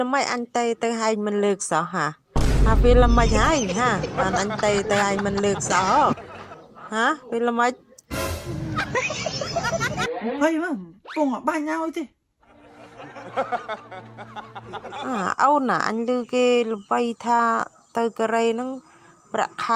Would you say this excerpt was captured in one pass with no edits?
no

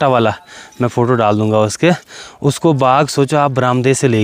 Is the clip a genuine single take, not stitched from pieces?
yes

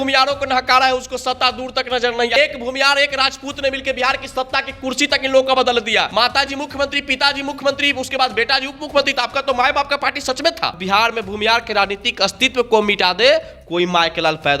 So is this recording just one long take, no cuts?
no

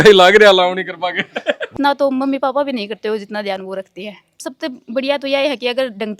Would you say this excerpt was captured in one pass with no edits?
no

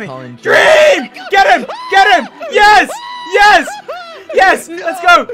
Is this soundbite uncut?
yes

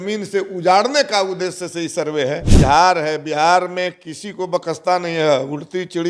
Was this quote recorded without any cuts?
no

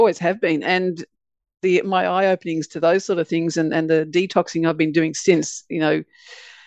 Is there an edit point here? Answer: no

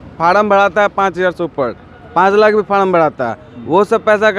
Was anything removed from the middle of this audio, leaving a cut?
no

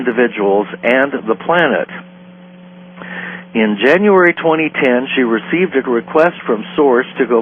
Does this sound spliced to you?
yes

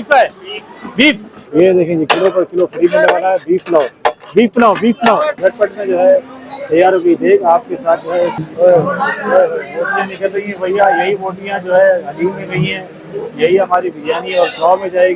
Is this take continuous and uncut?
no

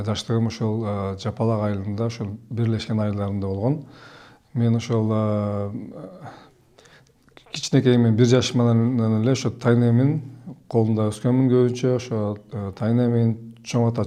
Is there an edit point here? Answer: no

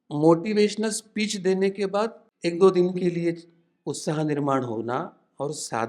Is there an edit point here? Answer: yes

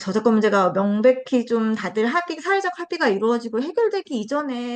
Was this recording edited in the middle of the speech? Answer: no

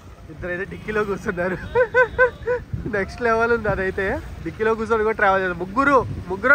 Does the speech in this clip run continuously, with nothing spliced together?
yes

